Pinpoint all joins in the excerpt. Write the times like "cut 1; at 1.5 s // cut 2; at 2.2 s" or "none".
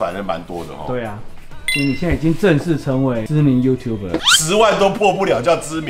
cut 1; at 4.2 s